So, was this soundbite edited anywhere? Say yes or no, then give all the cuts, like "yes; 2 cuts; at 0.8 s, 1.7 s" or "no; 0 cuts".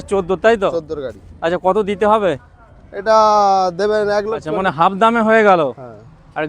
yes; 1 cut; at 4.5 s